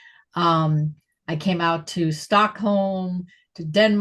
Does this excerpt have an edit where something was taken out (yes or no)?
no